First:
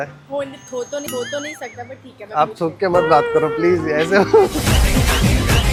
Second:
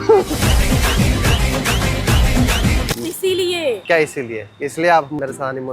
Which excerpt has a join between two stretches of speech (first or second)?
second